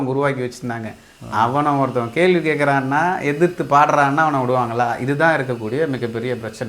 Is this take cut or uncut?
uncut